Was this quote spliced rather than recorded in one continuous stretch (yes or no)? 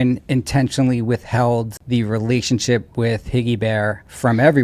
no